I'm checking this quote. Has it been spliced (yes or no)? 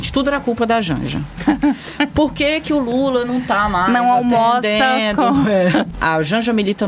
yes